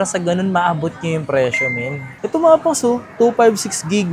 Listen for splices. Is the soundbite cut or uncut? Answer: cut